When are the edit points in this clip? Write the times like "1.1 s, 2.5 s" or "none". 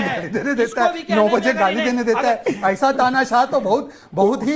none